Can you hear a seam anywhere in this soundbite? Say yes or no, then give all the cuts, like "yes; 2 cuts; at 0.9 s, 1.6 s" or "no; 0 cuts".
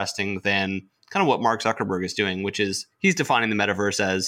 no; 0 cuts